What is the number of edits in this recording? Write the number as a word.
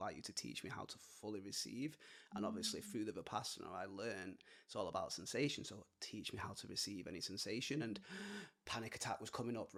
zero